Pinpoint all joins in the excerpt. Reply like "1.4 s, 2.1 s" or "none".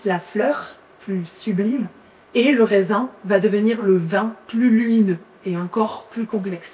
none